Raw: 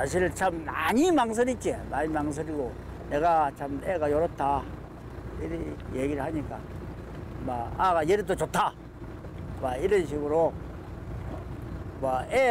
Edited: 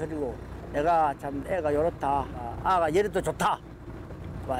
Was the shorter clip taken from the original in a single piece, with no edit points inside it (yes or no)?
no